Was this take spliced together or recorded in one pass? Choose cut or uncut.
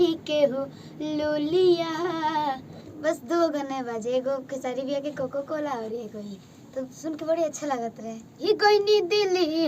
cut